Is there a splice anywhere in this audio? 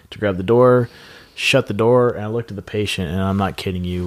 no; 0 cuts

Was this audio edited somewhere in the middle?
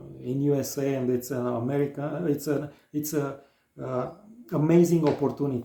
no; 0 cuts

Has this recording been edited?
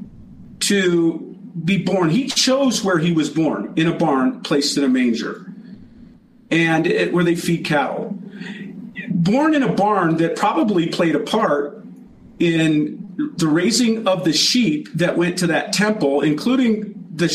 no; 0 cuts

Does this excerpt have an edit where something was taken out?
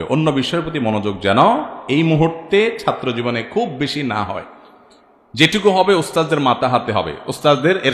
no; 0 cuts

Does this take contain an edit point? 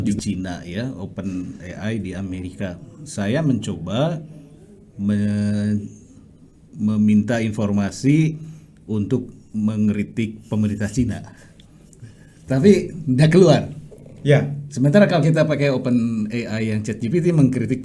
no; 0 cuts

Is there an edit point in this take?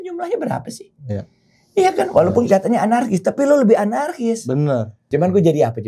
yes; 1 cut; at 5.0 s

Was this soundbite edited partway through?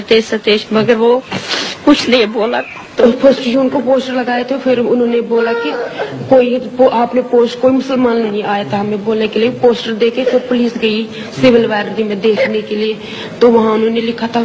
no; 0 cuts

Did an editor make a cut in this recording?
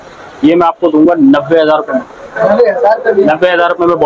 no; 0 cuts

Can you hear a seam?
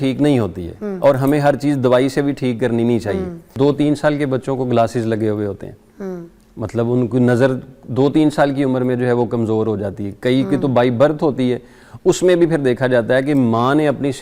yes; 1 cut; at 3.5 s

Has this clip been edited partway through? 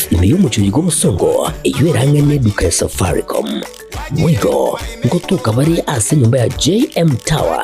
yes; 1 cut; at 6.5 s

